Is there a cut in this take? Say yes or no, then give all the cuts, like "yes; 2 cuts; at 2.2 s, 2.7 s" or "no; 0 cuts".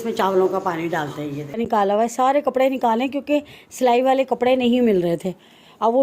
yes; 1 cut; at 1.4 s